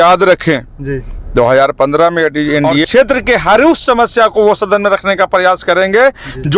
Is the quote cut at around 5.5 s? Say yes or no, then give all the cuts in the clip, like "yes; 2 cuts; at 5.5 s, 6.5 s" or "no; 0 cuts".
no; 1 cut; at 2.9 s